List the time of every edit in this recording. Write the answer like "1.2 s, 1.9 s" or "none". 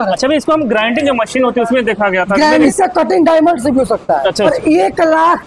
2.7 s, 4.5 s

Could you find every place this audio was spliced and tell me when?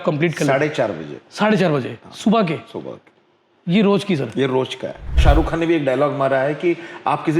5.2 s

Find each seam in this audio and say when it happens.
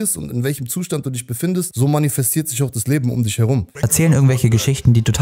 1.7 s, 3.8 s

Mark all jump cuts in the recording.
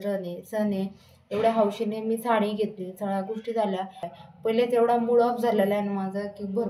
4.1 s

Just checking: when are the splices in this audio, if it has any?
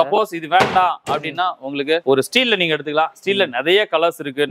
none

